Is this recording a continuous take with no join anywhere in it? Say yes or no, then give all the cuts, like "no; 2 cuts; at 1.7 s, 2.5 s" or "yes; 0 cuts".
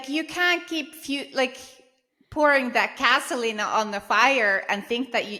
yes; 0 cuts